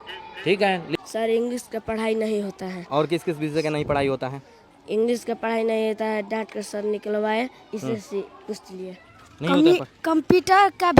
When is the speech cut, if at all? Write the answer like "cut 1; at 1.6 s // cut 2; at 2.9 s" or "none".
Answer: cut 1; at 0.9 s